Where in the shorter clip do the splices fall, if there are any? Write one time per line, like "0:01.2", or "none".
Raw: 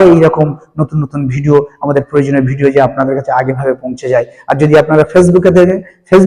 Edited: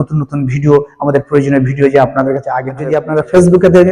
0:02.9